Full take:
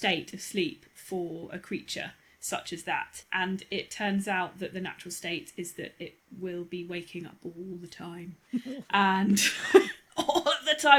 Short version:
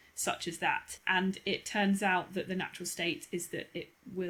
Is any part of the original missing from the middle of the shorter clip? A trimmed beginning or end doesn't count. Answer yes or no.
no